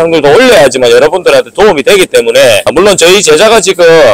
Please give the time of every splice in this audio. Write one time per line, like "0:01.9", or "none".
0:02.6